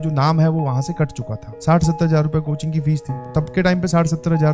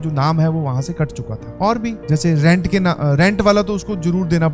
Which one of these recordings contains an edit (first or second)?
first